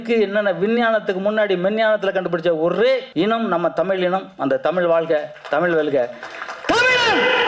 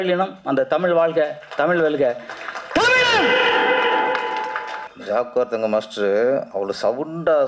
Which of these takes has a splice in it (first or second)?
second